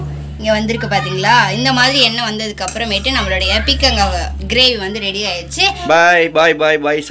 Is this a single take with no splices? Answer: no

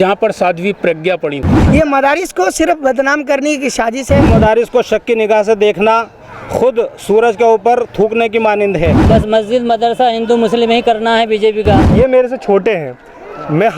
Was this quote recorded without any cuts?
no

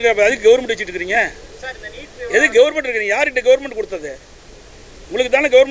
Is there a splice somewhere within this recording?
no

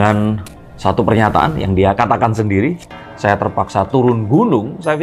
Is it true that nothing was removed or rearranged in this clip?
yes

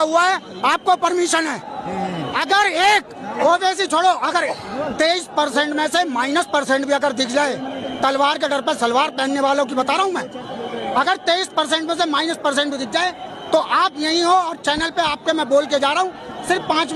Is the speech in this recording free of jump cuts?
yes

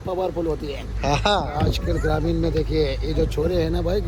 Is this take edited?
no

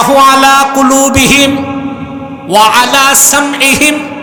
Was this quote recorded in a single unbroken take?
yes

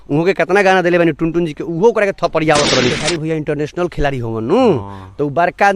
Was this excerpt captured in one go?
no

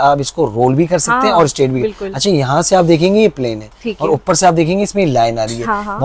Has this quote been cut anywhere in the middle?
no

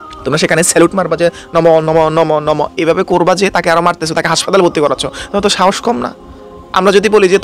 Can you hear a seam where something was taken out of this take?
no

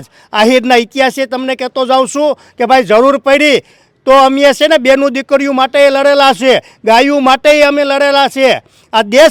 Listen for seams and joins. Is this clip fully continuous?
yes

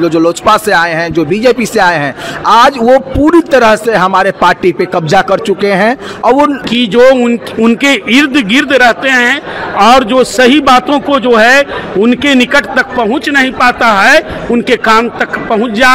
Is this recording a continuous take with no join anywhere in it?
no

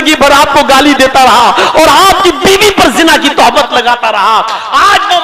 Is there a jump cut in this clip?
no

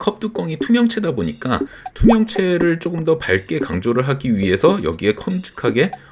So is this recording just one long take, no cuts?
yes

